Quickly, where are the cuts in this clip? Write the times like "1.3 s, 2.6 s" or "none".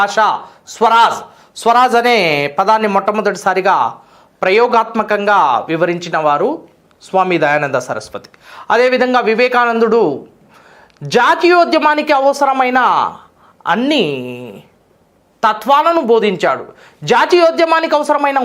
17.2 s